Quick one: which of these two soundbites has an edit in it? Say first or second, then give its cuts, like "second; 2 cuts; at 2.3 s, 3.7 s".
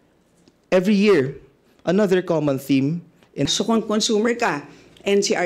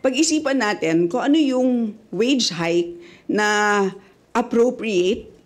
first; 1 cut; at 3.5 s